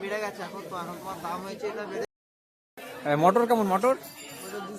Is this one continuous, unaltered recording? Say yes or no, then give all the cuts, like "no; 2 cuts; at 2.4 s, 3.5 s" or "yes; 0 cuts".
no; 1 cut; at 2.1 s